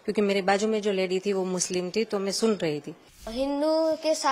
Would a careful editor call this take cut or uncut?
cut